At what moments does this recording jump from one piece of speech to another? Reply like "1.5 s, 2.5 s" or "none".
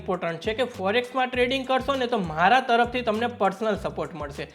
none